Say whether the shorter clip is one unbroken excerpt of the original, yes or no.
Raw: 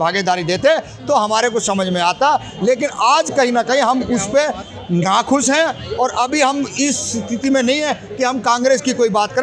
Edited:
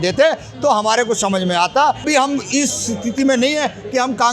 no